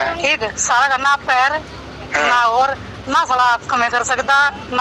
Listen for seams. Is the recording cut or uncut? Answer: uncut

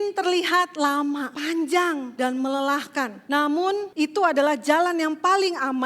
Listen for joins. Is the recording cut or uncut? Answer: cut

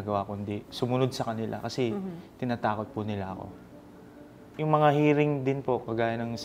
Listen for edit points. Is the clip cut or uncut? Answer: cut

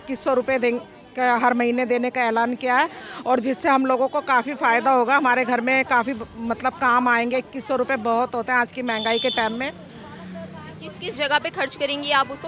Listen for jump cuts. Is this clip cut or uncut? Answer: uncut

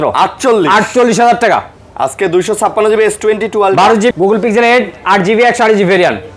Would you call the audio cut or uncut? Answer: cut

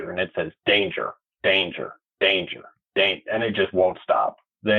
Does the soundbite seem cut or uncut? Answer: uncut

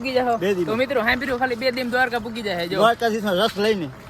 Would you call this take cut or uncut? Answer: uncut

